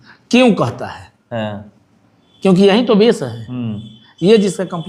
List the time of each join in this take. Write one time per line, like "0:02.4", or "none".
none